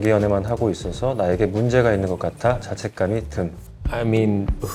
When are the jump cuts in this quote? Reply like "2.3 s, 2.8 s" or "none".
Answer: none